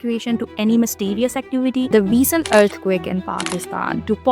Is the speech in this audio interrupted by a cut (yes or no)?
yes